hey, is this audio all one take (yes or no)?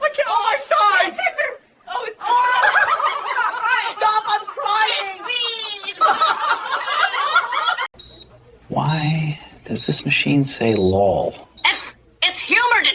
no